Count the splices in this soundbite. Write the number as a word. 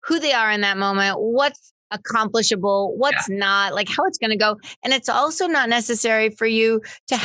one